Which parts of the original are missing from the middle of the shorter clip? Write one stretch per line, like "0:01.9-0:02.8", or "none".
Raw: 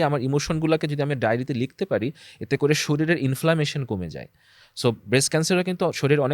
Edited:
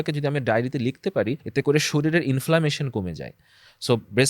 0:02.2-0:02.4